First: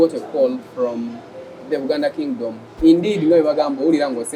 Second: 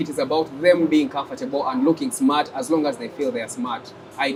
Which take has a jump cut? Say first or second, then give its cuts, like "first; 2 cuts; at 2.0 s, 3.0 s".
first; 1 cut; at 2.7 s